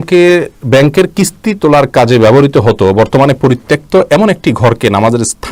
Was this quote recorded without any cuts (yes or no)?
yes